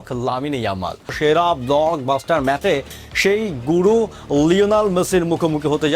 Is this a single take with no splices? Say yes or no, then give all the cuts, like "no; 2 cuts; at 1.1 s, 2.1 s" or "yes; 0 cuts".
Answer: no; 1 cut; at 1.1 s